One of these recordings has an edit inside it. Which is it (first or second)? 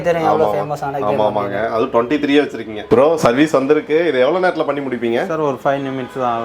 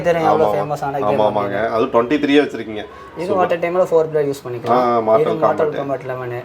first